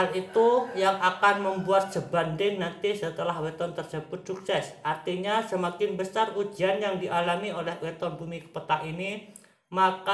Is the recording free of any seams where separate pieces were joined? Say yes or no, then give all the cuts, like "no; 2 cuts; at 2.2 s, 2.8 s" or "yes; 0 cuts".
yes; 0 cuts